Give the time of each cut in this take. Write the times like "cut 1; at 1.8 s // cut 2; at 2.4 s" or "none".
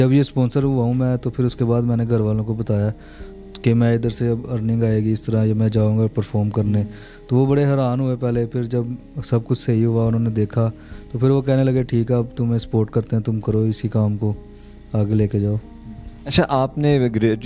none